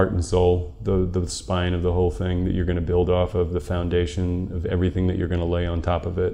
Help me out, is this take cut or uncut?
uncut